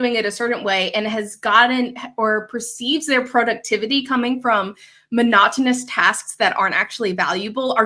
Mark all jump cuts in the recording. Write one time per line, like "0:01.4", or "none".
none